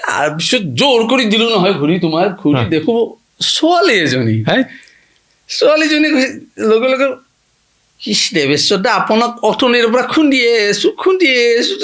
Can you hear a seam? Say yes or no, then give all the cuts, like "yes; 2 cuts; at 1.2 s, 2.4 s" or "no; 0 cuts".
no; 0 cuts